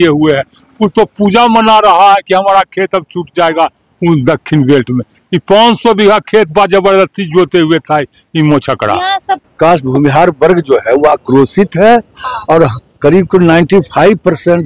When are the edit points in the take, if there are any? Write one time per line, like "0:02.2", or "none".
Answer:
0:09.5